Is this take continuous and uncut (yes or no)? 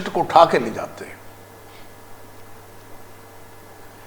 yes